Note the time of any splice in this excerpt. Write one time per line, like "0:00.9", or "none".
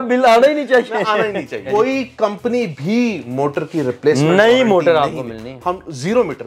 0:01.7